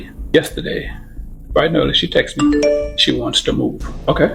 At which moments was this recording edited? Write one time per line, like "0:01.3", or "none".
none